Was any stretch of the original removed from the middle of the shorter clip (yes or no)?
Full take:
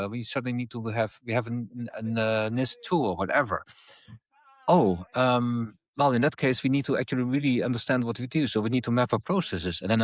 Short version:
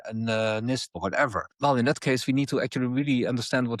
yes